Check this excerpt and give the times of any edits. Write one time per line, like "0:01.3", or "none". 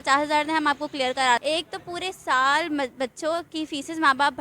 0:01.4